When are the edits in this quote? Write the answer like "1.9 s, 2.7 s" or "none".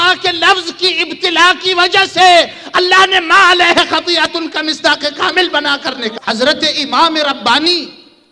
6.2 s